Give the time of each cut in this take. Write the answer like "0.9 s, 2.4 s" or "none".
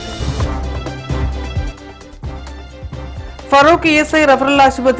3.2 s

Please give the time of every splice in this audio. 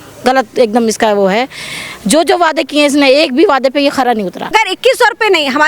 4.4 s

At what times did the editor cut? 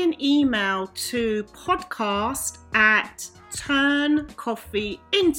none

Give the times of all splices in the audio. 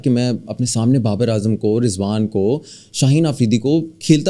none

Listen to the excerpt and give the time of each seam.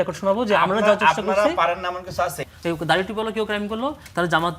2.5 s

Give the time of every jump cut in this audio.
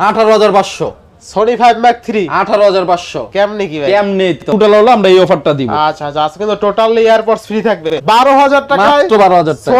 4.5 s, 7.9 s

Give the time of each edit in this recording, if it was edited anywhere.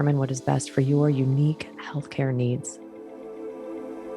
2.7 s

